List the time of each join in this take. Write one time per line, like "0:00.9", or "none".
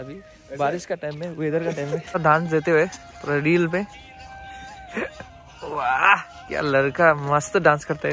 0:02.2